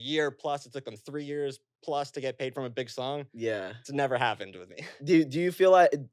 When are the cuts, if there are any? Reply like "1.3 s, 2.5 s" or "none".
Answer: none